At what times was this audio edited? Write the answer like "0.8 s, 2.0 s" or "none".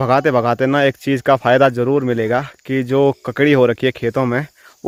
none